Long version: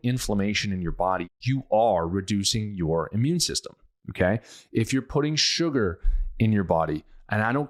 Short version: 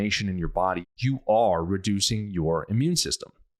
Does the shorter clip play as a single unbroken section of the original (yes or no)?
yes